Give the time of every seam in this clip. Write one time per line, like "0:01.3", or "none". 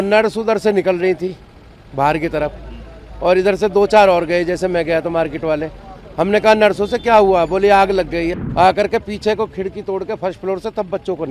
0:08.3